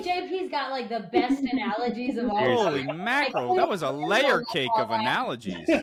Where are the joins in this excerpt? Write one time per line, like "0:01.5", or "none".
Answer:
none